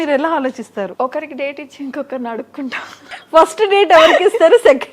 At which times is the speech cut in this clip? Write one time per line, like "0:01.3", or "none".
0:00.9
0:03.1